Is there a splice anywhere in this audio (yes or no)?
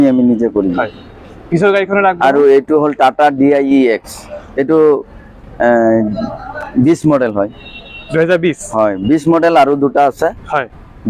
no